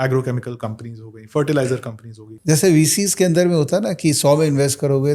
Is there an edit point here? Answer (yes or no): yes